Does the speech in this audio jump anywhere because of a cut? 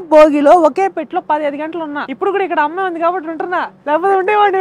no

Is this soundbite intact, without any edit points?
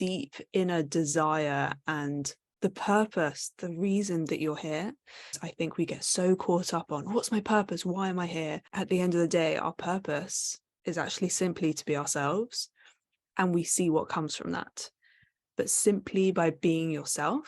no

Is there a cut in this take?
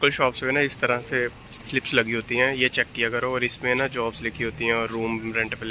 no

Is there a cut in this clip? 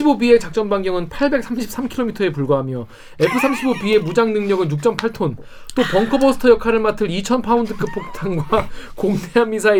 no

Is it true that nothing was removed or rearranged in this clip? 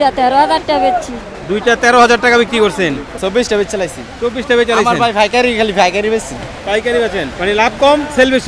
no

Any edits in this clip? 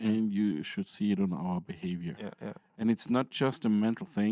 no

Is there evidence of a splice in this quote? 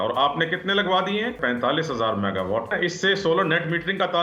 yes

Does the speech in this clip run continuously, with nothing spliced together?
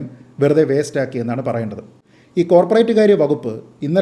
no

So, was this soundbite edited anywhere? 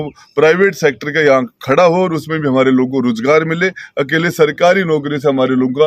no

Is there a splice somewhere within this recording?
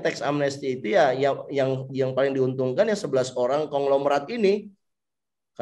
no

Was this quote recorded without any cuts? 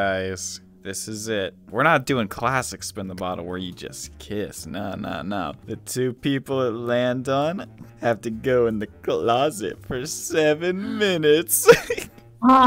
no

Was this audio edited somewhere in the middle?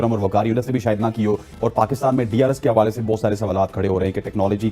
yes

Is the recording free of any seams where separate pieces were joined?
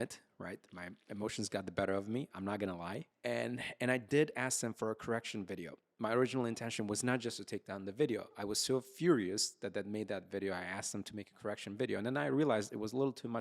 no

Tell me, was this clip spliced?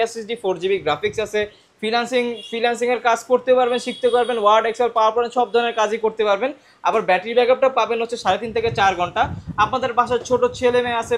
no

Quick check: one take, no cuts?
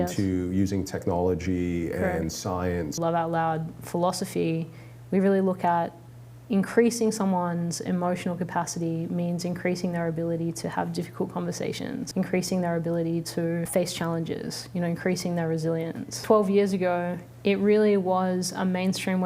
no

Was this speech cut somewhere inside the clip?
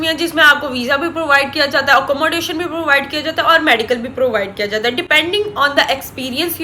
no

